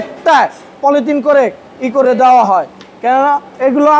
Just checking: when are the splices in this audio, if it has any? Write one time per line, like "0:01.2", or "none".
none